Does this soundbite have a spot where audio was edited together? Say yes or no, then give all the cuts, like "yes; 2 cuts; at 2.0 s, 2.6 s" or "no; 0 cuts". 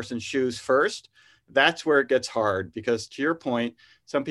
no; 0 cuts